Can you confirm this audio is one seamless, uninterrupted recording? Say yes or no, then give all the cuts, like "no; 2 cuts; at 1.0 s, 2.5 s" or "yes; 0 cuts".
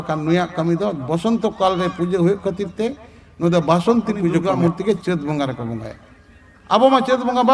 no; 1 cut; at 4.5 s